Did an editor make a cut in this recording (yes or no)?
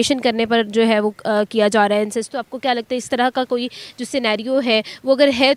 no